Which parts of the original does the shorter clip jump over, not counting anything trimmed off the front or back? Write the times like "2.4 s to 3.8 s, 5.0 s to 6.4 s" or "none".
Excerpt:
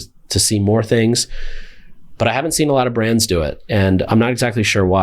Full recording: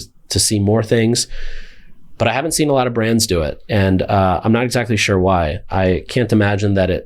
4.1 s to 4.4 s